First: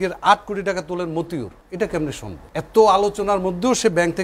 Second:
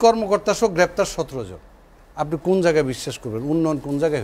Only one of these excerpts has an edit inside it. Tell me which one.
first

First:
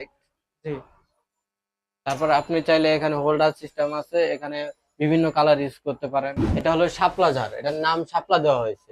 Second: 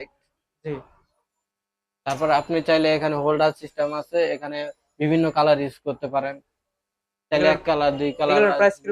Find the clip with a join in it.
first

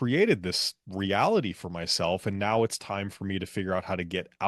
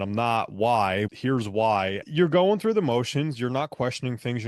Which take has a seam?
second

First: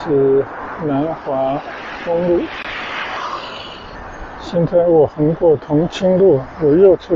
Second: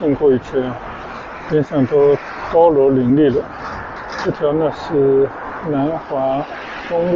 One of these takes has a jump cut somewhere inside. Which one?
first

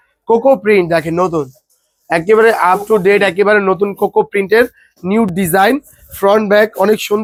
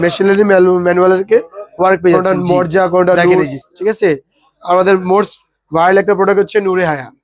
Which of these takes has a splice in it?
second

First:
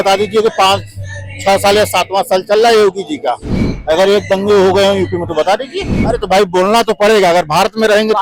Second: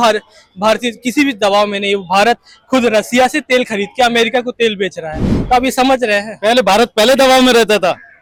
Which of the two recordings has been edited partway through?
first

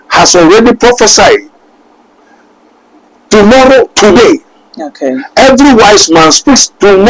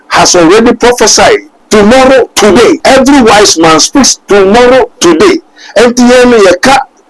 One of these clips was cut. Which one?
second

